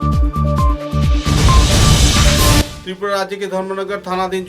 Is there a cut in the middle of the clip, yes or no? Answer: yes